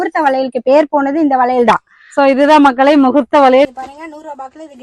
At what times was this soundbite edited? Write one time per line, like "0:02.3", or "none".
0:03.7